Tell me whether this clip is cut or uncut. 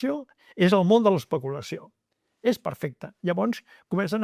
uncut